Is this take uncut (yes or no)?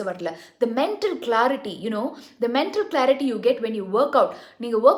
yes